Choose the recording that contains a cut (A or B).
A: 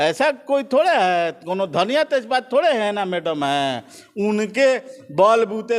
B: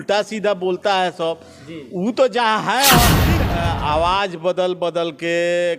B